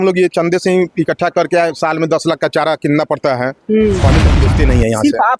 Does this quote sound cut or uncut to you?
cut